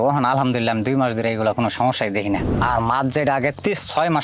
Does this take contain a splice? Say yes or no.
yes